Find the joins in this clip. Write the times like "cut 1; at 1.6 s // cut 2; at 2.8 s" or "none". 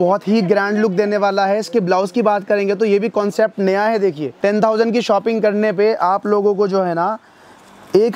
cut 1; at 4.3 s